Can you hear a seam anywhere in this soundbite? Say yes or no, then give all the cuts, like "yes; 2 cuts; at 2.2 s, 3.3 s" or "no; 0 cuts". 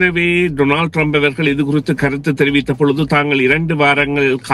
no; 0 cuts